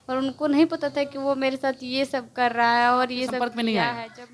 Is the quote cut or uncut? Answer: cut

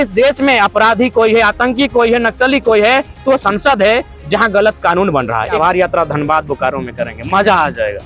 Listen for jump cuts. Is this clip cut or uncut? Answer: cut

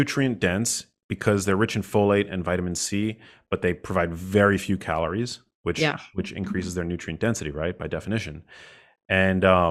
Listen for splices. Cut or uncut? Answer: uncut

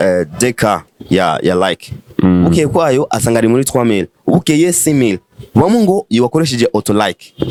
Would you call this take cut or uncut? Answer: uncut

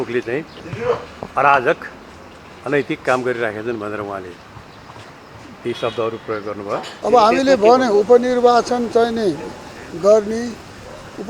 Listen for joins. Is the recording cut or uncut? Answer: cut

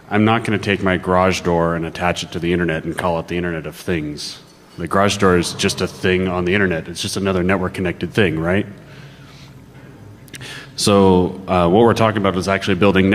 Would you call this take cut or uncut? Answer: cut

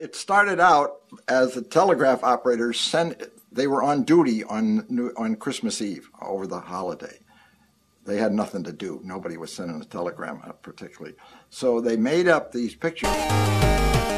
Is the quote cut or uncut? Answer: uncut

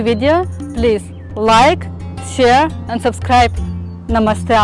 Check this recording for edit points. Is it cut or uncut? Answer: uncut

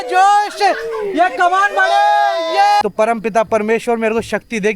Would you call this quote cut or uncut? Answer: cut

